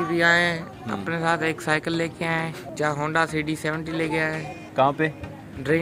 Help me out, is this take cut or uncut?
cut